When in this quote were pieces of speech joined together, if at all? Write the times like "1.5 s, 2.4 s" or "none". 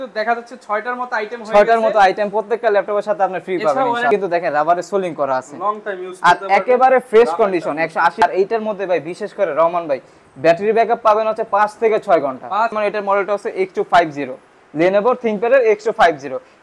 4.1 s, 8.2 s, 12.7 s